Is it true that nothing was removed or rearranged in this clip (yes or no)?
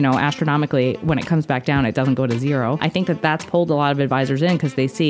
no